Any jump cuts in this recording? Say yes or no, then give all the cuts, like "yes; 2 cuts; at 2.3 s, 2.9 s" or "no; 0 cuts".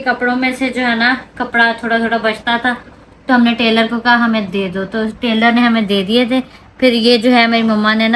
no; 0 cuts